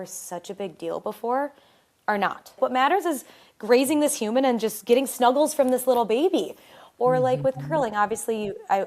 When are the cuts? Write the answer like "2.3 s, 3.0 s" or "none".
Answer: 2.6 s